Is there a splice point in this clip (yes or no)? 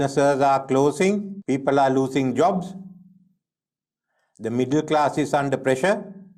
no